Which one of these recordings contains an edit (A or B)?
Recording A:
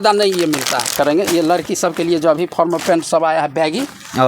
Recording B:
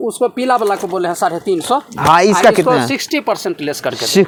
A